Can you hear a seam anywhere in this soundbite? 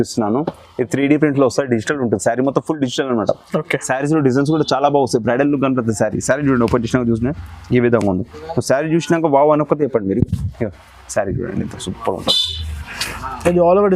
no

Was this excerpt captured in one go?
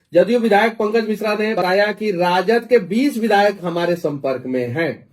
no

